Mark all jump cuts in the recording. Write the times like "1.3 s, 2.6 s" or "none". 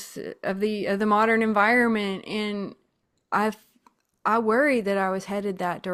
none